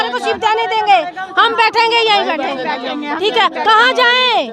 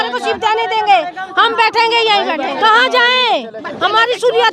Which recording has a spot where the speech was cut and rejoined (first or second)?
second